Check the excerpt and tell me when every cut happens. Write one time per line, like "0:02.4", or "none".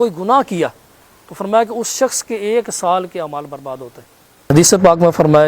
0:04.5